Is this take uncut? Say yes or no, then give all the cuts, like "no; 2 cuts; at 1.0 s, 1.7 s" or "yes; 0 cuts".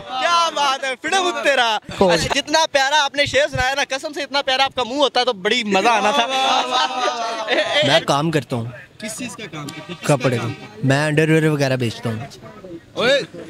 no; 2 cuts; at 1.9 s, 8.0 s